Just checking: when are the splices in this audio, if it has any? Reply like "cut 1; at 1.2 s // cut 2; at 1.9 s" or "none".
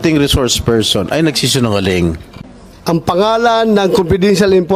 cut 1; at 2.2 s